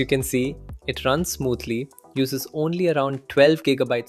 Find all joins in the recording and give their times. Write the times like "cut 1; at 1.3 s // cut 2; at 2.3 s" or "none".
none